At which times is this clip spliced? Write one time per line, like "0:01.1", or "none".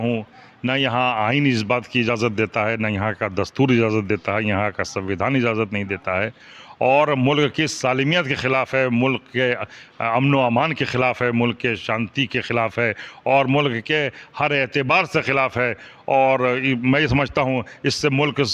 none